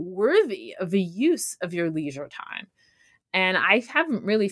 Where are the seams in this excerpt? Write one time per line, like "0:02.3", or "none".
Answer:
none